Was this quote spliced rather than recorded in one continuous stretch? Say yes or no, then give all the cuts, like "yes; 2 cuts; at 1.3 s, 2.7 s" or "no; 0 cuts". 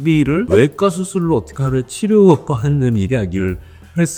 no; 0 cuts